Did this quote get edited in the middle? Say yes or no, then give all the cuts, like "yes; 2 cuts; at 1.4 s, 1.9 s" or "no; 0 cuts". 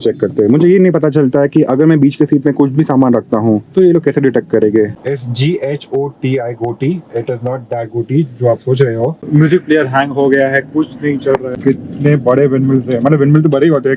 yes; 3 cuts; at 5.0 s, 9.2 s, 11.6 s